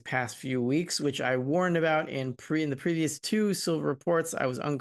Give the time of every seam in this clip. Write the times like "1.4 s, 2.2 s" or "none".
none